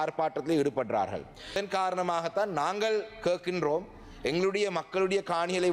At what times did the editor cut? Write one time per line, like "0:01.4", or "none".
0:01.6